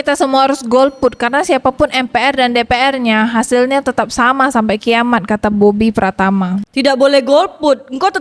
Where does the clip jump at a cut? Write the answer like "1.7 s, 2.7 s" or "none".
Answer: none